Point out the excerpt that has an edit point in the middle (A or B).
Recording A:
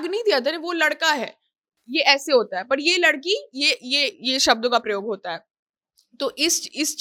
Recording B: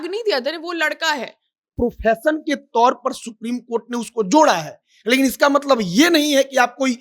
B